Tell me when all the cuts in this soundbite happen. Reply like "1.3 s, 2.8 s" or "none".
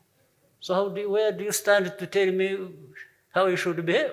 none